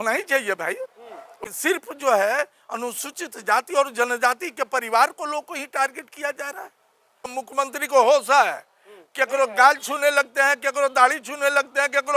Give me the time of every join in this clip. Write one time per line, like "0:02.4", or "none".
0:01.4
0:07.3